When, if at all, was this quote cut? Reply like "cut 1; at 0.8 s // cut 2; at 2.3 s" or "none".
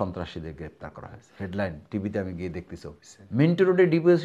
cut 1; at 3.2 s